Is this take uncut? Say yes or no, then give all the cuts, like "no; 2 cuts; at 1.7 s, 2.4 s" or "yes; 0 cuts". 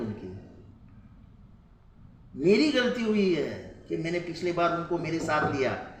yes; 0 cuts